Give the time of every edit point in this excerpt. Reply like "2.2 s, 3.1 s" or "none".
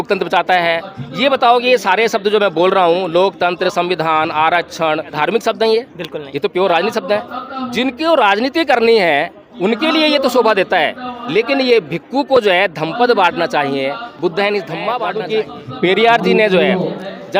5.1 s, 15.1 s